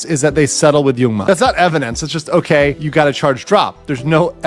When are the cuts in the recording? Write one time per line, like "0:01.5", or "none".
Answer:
0:01.2
0:02.8